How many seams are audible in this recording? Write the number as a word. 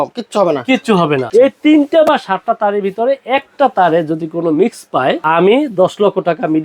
two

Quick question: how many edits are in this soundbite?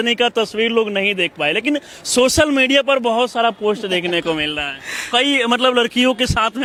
zero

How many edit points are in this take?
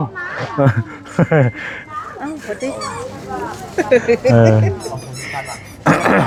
zero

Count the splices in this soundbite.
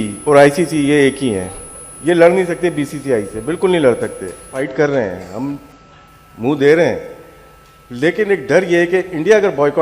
one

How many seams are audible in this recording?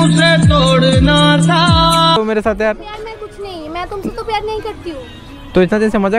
one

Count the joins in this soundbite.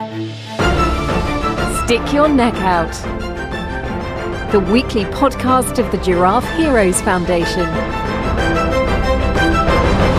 zero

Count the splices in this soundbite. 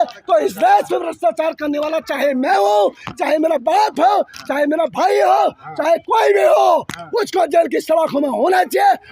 zero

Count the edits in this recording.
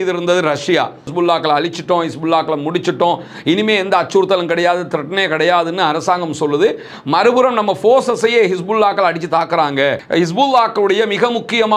two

